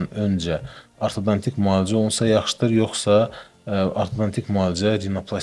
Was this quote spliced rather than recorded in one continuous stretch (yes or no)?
no